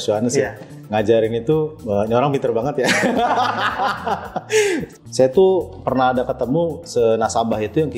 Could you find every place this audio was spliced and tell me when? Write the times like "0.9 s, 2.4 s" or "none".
4.9 s